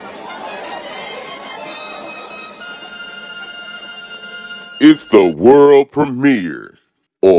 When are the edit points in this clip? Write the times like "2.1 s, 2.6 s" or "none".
4.7 s